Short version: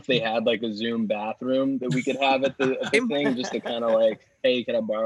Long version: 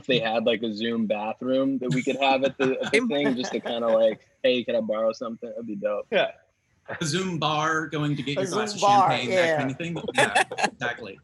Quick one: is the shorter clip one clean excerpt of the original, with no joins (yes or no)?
yes